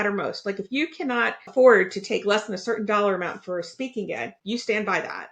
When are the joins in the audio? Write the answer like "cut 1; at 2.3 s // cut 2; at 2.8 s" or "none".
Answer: cut 1; at 1.4 s // cut 2; at 4.3 s